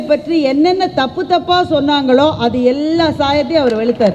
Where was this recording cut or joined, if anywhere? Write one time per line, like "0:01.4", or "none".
none